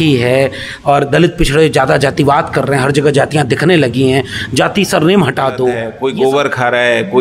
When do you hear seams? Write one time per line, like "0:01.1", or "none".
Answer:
0:05.9